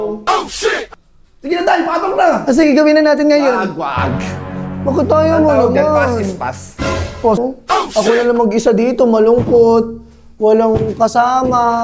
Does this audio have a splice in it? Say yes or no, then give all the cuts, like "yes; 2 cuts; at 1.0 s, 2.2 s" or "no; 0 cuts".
yes; 1 cut; at 7.4 s